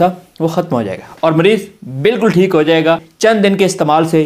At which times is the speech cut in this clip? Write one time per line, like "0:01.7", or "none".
0:03.1